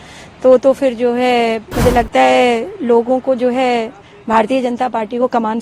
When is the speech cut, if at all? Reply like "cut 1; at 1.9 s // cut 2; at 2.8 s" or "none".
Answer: cut 1; at 1.7 s